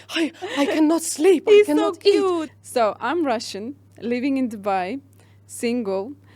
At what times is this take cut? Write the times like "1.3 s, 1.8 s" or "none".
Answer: 2.5 s